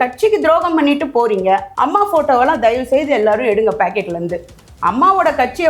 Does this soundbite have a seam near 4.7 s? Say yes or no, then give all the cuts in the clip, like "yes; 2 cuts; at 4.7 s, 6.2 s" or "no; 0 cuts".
no; 1 cut; at 1.7 s